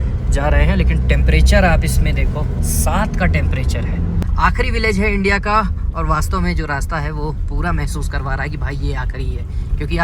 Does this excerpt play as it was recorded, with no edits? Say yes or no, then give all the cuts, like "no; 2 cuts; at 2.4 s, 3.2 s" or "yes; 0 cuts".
no; 1 cut; at 4.2 s